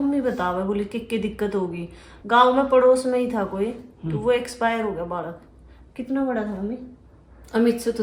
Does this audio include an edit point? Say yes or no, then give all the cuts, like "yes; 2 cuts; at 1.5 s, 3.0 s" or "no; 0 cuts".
no; 0 cuts